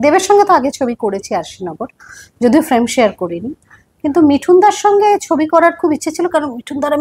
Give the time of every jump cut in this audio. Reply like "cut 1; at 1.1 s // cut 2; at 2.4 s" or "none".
none

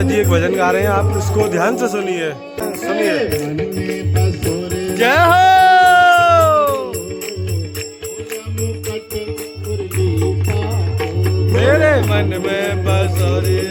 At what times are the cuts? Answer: none

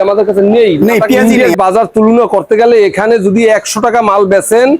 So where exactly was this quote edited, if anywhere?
cut 1; at 1.2 s

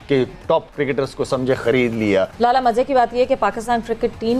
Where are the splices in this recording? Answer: cut 1; at 2.3 s

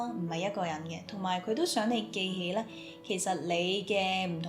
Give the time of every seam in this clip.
none

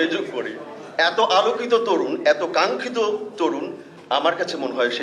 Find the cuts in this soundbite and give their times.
none

